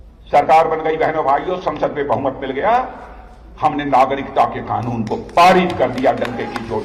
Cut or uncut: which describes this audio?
uncut